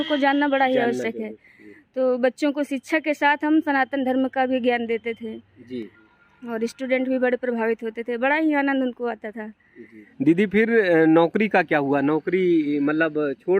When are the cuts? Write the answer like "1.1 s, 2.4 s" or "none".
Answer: 6.0 s, 10.1 s